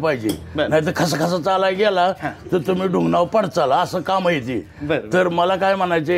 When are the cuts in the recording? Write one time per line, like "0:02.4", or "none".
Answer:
none